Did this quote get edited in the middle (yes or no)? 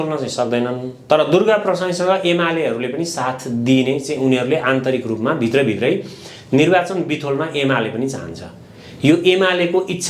no